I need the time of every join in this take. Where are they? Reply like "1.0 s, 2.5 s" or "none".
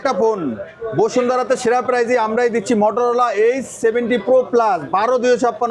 none